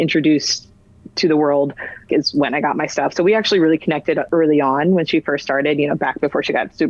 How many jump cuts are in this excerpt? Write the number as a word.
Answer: two